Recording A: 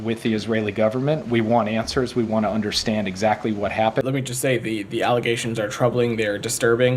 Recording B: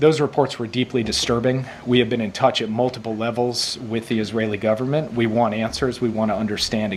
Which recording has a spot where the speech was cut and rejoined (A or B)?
A